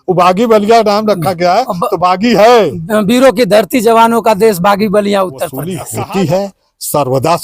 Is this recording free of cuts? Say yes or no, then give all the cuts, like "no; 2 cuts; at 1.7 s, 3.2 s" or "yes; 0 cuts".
no; 1 cut; at 5.8 s